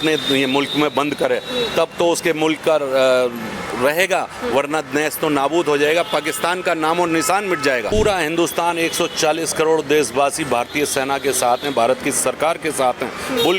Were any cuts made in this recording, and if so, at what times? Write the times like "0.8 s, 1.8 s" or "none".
7.9 s